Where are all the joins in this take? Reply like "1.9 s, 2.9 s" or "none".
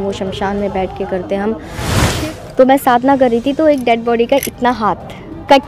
2.0 s